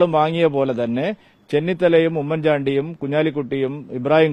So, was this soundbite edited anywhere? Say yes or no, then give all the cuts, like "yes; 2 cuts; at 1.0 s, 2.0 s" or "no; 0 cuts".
no; 0 cuts